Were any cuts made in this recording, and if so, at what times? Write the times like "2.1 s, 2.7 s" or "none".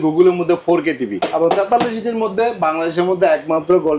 1.2 s